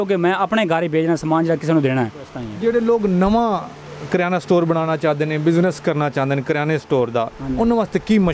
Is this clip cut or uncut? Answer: cut